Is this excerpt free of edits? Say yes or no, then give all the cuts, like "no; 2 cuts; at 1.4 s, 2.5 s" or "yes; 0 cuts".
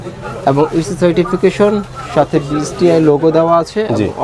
yes; 0 cuts